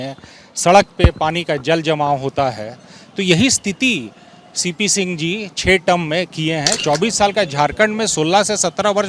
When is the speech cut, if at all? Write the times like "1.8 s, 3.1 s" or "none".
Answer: 6.7 s